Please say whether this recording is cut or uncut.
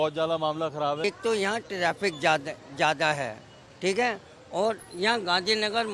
cut